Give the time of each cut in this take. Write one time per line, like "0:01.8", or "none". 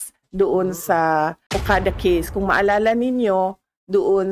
0:01.5